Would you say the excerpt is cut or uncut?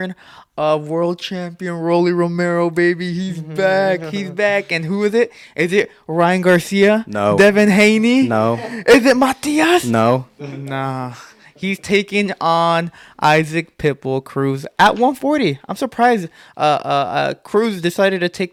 uncut